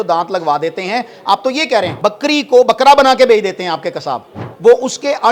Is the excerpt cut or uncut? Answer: cut